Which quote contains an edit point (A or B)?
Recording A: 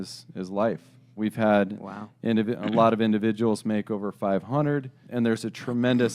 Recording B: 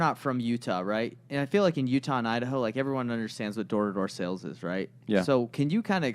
A